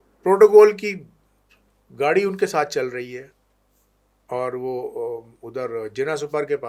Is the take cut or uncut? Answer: uncut